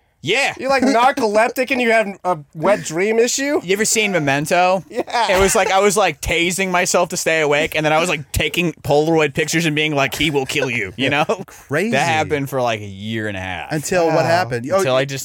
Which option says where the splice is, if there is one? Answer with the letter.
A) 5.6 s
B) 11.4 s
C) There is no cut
B